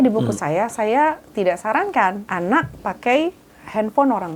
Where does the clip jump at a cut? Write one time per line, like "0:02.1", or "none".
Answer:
0:02.2